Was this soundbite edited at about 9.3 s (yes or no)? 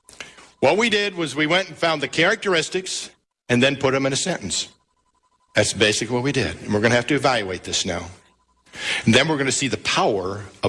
no